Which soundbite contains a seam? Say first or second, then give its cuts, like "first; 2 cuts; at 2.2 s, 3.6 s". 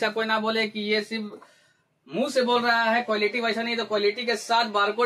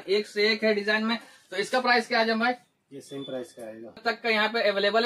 second; 1 cut; at 4.0 s